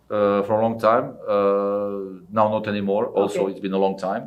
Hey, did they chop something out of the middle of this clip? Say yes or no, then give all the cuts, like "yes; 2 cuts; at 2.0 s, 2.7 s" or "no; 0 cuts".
no; 0 cuts